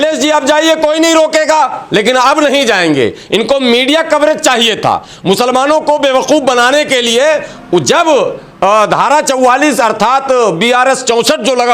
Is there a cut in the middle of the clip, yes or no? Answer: no